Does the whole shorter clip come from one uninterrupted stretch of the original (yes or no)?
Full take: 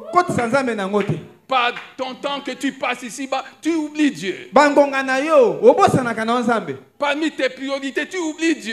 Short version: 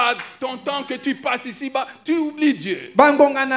yes